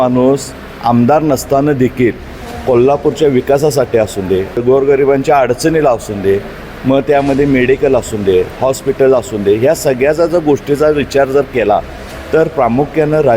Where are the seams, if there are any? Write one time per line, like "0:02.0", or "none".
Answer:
0:04.6

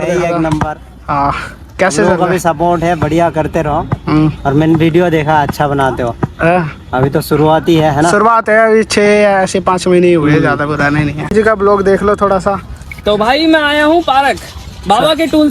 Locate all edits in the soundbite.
0:11.2

